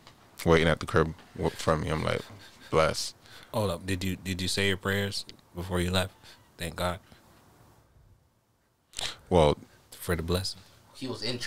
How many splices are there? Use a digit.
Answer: 0